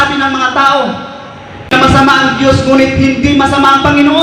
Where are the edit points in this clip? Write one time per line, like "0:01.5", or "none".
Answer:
0:01.7